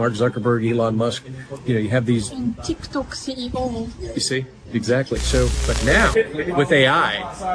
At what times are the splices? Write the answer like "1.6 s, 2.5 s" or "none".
5.6 s